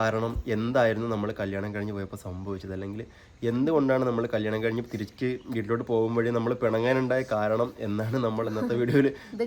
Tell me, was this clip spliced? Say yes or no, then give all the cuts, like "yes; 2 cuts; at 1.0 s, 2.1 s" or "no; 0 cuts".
no; 0 cuts